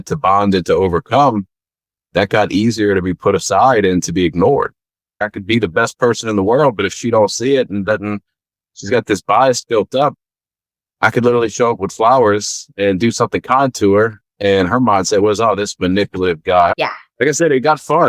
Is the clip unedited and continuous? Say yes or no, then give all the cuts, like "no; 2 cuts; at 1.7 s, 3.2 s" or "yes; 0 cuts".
no; 2 cuts; at 5.2 s, 16.7 s